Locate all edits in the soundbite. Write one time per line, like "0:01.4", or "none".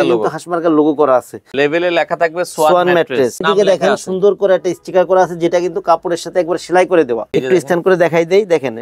0:01.5
0:03.4
0:07.3